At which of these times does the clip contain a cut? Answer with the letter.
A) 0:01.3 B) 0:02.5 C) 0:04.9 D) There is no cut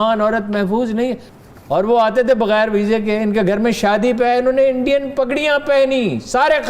A